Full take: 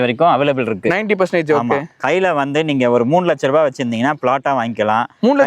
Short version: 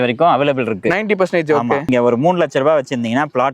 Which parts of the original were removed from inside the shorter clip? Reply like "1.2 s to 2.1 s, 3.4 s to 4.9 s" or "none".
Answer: 1.9 s to 2.7 s